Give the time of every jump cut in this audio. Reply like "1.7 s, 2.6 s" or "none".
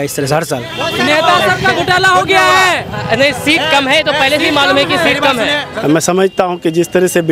0.9 s, 5.6 s